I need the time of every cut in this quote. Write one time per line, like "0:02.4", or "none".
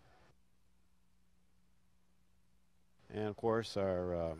0:02.4